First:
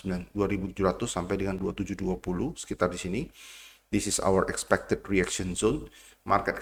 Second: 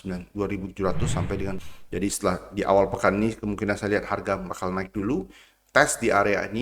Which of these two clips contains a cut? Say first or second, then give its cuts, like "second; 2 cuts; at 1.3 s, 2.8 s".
second; 1 cut; at 1.6 s